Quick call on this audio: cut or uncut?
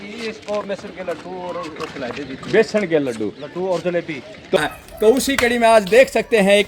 cut